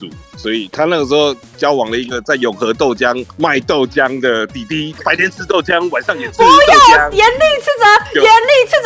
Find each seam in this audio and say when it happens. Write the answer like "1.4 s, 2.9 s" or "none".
5.0 s